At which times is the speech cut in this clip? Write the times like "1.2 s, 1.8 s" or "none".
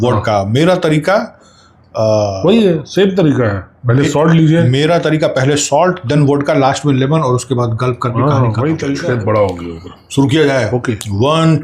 9.0 s